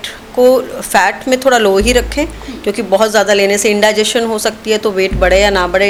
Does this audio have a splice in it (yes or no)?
no